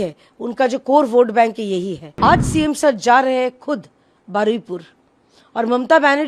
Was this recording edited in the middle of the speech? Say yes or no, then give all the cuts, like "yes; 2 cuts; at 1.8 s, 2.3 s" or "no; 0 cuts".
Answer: yes; 1 cut; at 2.0 s